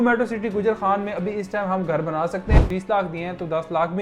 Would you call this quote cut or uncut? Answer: cut